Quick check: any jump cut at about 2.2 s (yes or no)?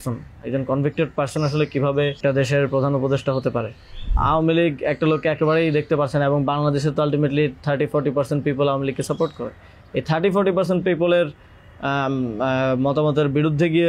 yes